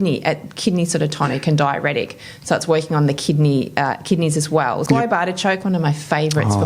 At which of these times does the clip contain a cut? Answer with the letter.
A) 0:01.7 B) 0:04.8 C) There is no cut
B